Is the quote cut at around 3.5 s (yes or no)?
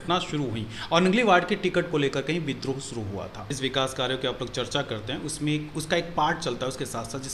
yes